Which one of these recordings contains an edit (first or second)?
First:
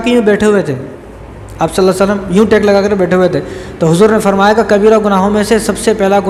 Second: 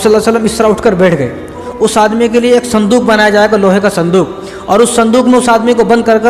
second